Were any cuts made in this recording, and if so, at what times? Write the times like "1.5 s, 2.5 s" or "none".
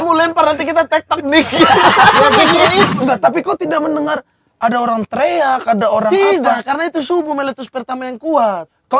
2.9 s